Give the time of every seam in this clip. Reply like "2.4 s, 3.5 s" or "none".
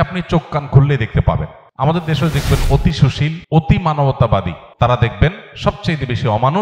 1.6 s, 3.4 s, 4.6 s